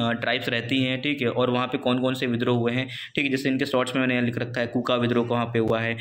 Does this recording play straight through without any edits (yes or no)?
yes